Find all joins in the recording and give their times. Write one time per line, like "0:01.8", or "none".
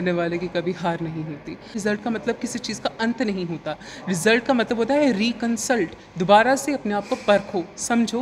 0:01.8